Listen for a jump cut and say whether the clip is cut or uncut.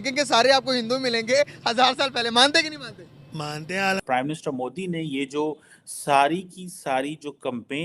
cut